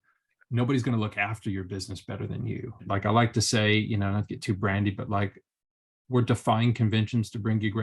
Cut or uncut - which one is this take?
cut